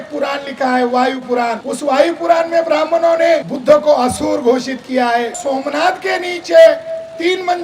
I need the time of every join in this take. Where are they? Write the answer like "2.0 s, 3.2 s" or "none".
1.7 s, 3.5 s, 5.4 s